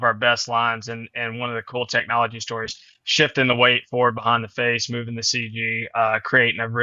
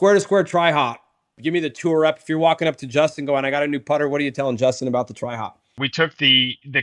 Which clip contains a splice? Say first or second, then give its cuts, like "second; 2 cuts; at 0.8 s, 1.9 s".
second; 2 cuts; at 1.4 s, 5.7 s